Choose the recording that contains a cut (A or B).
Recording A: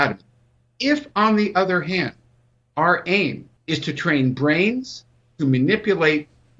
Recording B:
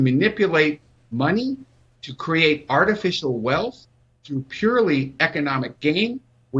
A